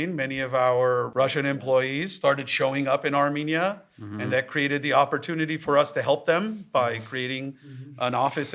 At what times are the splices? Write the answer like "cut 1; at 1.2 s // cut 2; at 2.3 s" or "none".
cut 1; at 1.1 s